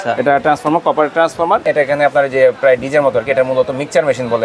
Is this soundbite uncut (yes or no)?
no